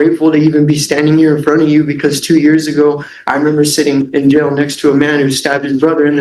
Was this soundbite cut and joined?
no; 0 cuts

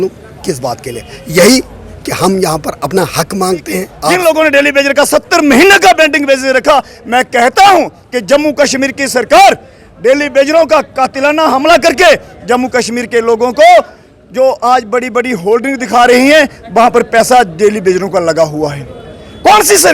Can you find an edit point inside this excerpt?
yes; 1 cut; at 4.0 s

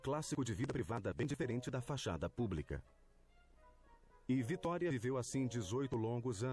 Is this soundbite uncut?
no; 1 cut; at 1.0 s

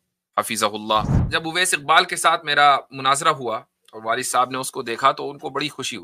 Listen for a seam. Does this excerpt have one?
yes; 1 cut; at 1.2 s

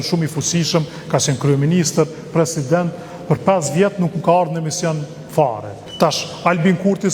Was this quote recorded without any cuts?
no; 1 cut; at 5.7 s

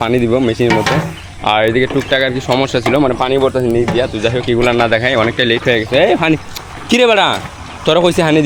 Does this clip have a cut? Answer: no; 0 cuts

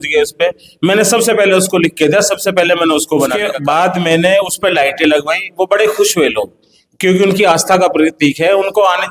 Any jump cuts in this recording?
yes; 1 cut; at 3.5 s

